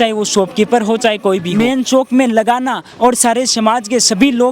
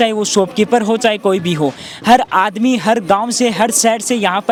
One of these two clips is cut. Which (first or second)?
first